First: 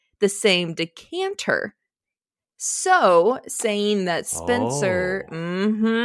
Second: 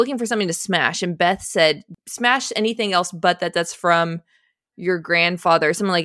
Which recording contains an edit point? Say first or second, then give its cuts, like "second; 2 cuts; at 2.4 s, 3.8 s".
second; 1 cut; at 1.9 s